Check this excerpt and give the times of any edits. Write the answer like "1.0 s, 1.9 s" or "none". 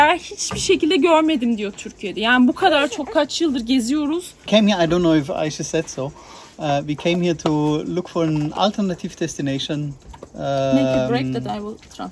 4.5 s